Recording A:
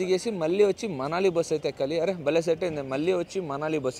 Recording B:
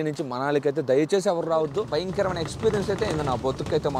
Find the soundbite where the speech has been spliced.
B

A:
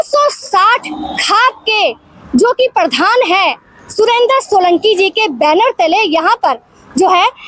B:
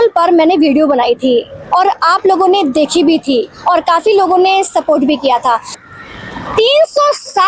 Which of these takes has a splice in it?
B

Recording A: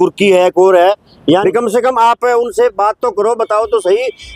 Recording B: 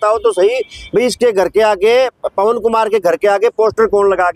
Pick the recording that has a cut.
A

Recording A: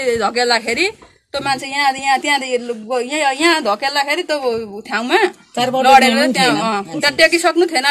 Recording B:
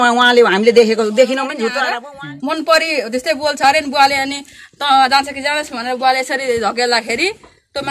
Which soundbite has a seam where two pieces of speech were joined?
B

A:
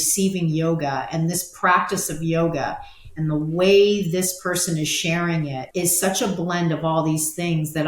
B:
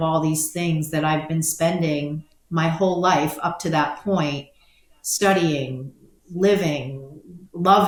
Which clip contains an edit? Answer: A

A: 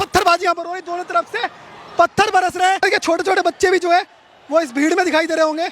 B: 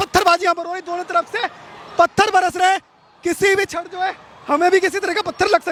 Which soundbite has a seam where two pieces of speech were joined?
A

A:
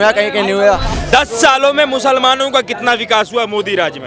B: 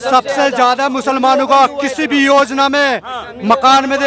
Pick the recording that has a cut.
A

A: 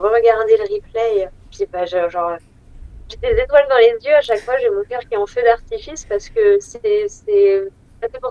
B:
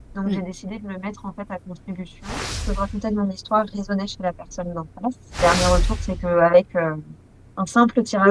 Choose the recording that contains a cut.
B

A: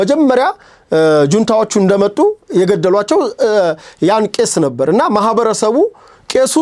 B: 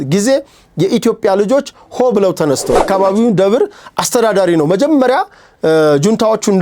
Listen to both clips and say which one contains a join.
B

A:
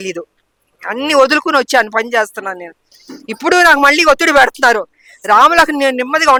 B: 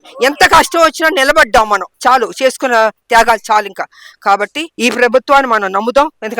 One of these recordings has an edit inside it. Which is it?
B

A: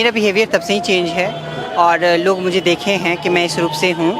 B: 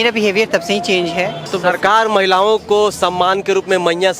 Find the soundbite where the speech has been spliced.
B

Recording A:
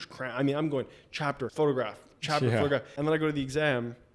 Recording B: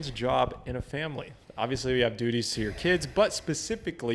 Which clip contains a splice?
A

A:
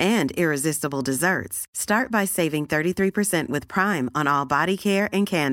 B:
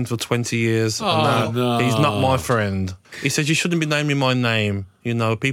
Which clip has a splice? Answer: B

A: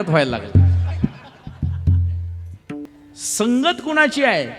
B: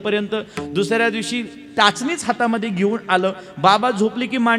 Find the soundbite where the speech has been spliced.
A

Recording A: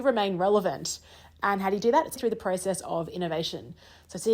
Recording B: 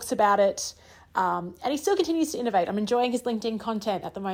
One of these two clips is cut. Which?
A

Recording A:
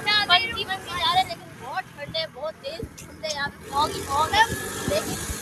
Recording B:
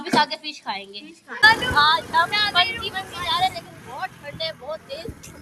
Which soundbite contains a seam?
B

